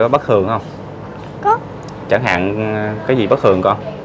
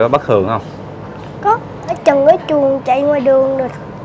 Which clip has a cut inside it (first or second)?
second